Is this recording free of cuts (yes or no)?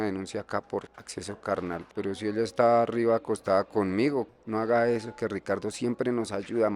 no